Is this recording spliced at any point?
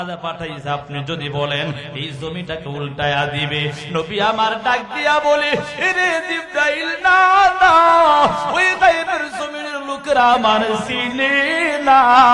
no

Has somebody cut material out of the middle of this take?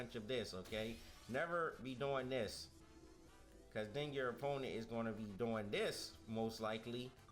yes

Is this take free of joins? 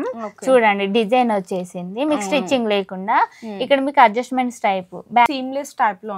no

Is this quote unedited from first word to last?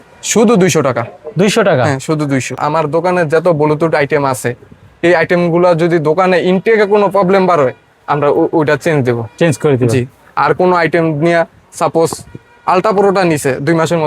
no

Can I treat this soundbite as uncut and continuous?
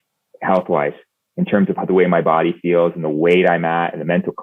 yes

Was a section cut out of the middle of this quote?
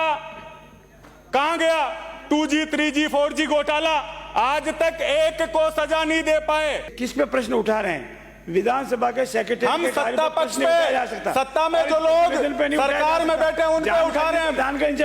yes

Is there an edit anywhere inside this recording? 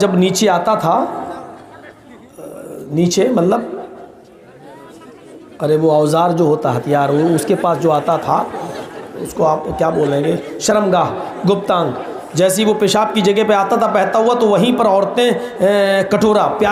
no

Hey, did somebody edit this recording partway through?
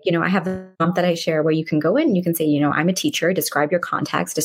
no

